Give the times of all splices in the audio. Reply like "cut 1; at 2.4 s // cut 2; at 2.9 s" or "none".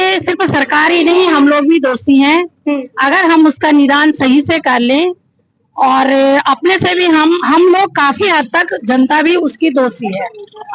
none